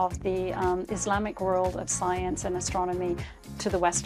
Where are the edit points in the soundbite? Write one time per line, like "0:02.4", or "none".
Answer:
none